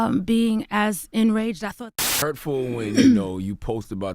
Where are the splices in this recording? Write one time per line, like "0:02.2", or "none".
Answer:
0:01.9